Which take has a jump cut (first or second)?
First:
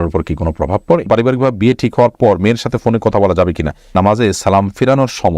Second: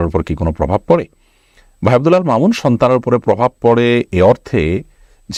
first